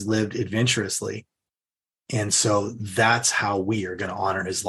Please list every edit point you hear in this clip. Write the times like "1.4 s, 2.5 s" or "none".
none